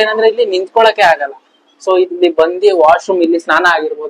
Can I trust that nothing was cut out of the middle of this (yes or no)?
yes